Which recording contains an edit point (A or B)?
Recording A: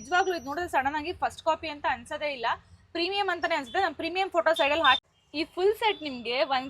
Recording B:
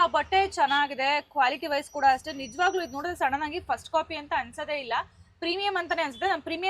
A